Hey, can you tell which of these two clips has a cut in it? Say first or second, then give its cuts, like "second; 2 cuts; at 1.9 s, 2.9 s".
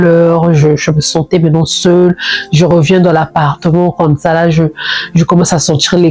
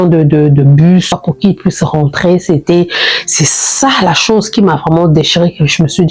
second; 1 cut; at 1.2 s